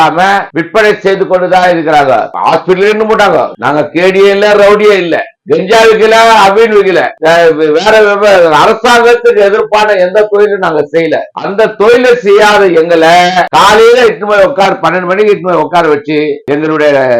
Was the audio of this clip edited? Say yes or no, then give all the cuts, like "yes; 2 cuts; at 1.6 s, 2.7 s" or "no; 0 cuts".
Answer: yes; 1 cut; at 2.3 s